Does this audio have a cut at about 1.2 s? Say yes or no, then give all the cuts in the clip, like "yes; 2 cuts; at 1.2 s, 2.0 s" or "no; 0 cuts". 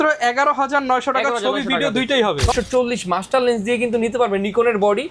no; 1 cut; at 2.5 s